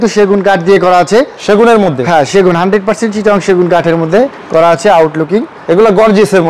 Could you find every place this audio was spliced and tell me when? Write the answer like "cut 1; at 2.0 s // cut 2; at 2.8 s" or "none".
none

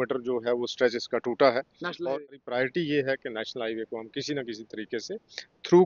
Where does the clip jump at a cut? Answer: cut 1; at 2.1 s

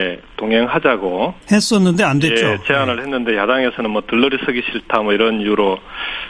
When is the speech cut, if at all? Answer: cut 1; at 2.2 s

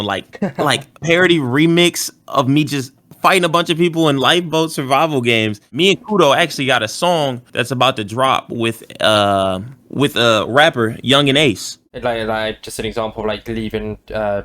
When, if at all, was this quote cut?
cut 1; at 5.6 s // cut 2; at 11.9 s

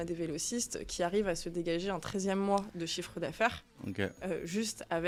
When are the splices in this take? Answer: none

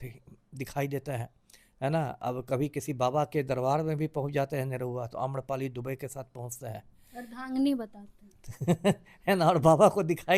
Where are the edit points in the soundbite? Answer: none

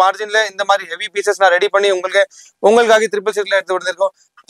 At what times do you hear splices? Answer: none

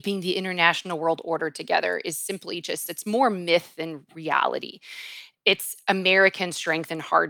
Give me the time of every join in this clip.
cut 1; at 4.1 s

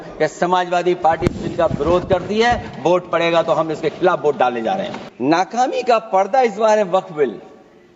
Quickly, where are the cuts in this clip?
cut 1; at 5.0 s

